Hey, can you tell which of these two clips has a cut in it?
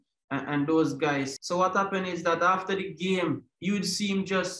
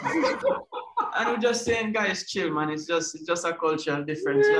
first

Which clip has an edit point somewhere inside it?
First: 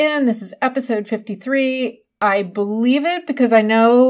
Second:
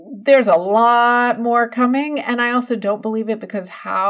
first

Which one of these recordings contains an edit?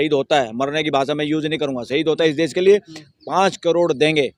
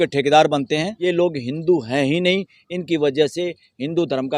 second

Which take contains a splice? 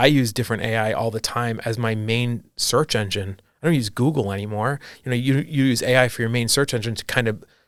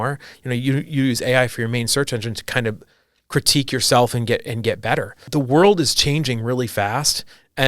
second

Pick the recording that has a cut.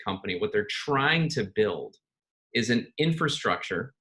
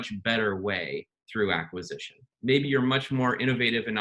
second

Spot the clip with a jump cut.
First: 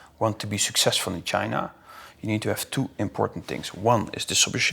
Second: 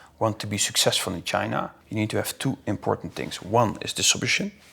second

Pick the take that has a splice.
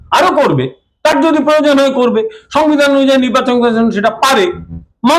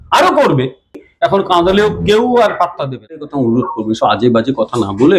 second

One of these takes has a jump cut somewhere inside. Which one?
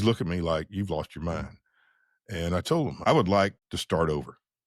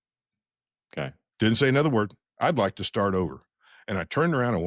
first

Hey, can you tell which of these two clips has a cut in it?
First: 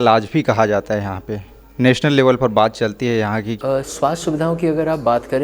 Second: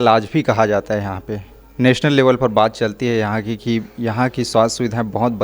first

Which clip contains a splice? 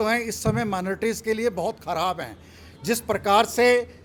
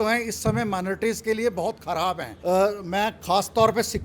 second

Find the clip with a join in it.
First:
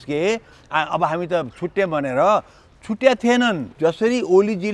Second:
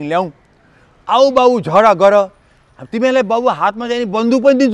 first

